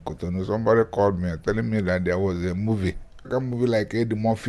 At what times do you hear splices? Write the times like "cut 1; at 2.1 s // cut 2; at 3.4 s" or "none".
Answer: cut 1; at 3.3 s